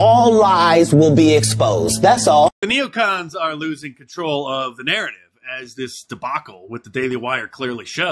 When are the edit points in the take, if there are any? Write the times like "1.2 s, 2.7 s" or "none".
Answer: 2.6 s